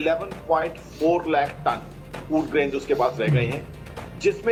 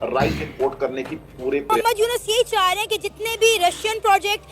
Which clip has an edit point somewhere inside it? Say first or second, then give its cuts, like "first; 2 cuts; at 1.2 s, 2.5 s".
second; 1 cut; at 1.7 s